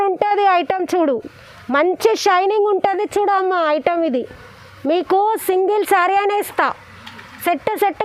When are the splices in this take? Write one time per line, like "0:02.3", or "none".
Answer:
none